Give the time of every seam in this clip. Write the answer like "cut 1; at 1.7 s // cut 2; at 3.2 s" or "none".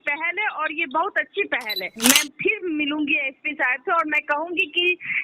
cut 1; at 1.9 s